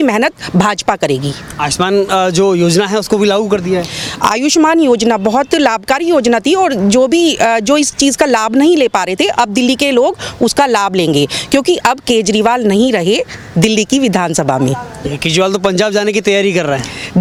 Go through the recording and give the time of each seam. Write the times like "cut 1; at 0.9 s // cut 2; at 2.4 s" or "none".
none